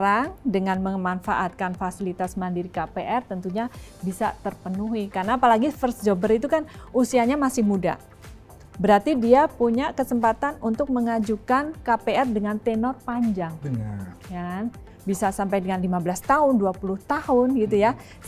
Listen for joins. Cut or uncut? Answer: uncut